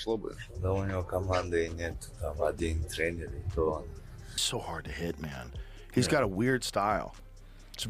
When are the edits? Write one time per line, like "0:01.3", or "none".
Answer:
0:04.5